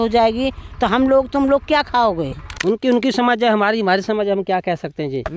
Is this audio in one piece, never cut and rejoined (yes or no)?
no